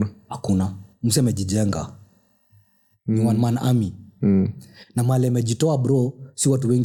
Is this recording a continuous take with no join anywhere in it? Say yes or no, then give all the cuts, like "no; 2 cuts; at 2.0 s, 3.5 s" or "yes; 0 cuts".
yes; 0 cuts